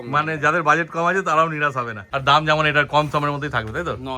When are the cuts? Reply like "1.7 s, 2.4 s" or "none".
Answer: 2.0 s